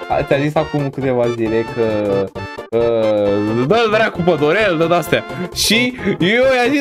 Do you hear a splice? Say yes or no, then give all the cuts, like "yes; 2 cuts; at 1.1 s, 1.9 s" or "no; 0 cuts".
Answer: no; 0 cuts